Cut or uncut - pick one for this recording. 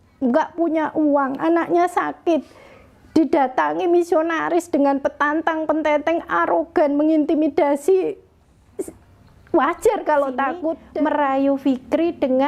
cut